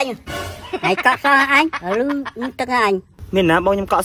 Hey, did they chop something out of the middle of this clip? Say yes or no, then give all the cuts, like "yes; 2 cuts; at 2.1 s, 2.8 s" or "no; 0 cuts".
no; 0 cuts